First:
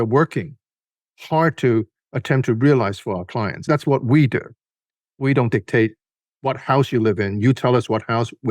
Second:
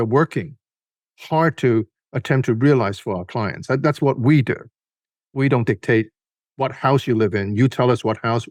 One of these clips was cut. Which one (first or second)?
first